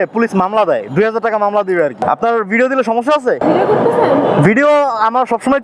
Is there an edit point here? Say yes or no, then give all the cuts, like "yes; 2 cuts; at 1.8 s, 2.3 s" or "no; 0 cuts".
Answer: yes; 2 cuts; at 2.0 s, 3.4 s